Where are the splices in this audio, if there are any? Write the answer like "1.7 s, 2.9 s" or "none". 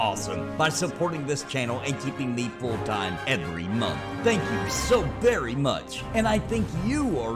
6.2 s